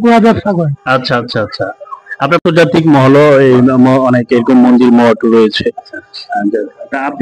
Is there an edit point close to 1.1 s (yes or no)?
no